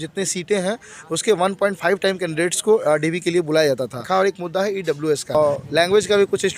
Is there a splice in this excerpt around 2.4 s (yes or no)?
no